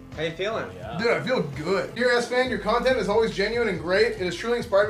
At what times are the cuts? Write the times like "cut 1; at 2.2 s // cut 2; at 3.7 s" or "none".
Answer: cut 1; at 1.9 s